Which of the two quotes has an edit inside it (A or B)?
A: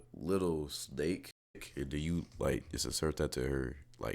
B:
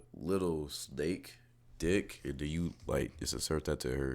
A